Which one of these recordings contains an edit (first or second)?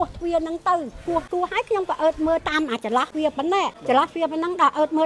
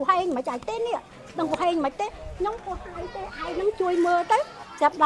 first